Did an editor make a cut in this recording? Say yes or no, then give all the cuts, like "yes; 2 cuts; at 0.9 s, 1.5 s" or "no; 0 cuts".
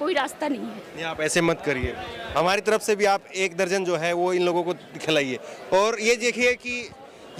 no; 0 cuts